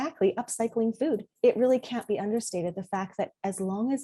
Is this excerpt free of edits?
no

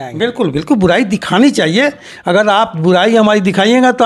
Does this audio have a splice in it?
no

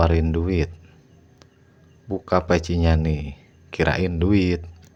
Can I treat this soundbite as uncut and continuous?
yes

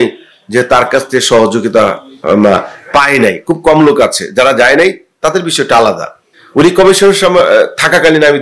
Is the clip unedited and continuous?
yes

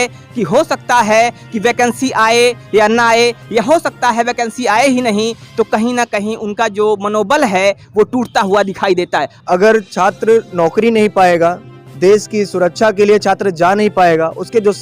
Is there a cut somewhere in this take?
yes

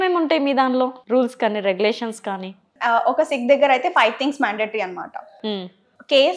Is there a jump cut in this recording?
yes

